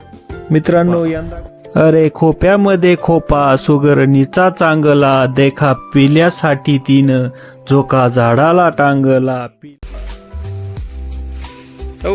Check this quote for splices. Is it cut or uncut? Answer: cut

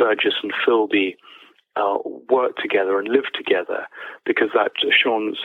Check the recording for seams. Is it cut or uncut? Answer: uncut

